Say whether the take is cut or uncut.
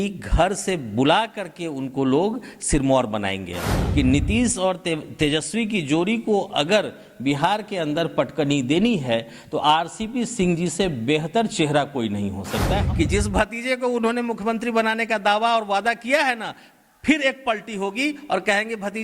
cut